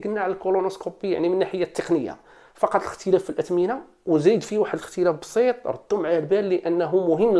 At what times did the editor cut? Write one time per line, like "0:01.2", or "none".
none